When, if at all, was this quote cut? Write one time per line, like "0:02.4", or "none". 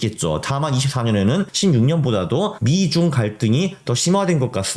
0:01.5
0:02.6